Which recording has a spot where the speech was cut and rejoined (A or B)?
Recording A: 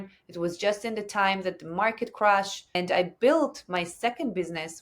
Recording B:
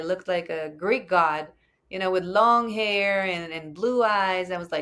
A